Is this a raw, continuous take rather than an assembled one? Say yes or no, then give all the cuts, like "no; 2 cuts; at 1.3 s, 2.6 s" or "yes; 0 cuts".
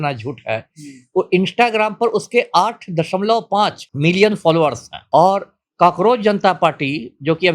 no; 2 cuts; at 3.8 s, 4.9 s